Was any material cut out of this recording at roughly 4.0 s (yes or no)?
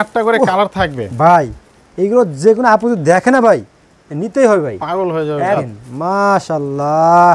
no